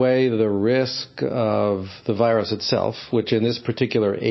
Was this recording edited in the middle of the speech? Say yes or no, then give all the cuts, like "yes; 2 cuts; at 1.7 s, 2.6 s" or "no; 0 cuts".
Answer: no; 0 cuts